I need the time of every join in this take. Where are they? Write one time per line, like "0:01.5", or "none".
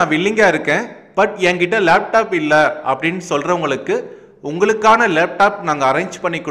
none